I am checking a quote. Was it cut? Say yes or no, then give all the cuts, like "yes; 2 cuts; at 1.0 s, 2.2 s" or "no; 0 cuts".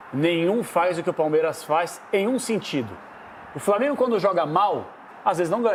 no; 0 cuts